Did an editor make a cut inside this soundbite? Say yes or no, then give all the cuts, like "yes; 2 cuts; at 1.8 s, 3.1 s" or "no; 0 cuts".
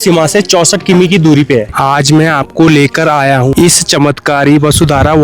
yes; 2 cuts; at 1.7 s, 3.5 s